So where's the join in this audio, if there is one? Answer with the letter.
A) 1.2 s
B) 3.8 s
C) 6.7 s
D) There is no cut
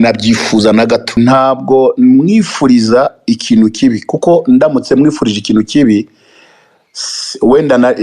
A